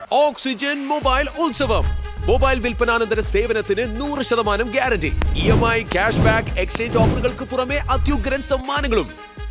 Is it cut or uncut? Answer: uncut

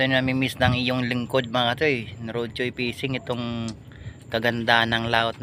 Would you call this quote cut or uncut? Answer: uncut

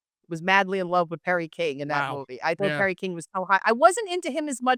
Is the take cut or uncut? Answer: uncut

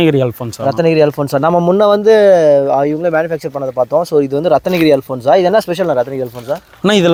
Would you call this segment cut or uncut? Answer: uncut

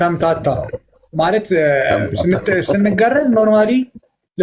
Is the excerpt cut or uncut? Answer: uncut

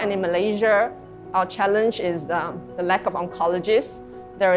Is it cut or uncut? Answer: uncut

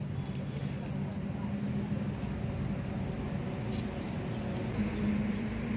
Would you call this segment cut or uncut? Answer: cut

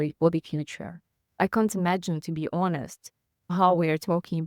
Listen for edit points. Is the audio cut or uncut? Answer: cut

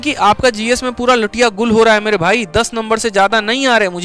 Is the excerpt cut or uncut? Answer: uncut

